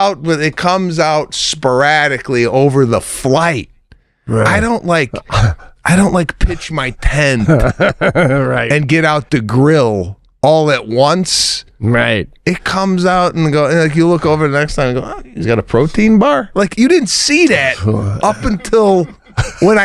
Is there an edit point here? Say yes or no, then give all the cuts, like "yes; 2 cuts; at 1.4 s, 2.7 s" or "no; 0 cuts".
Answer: no; 0 cuts